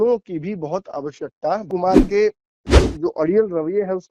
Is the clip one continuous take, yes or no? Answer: no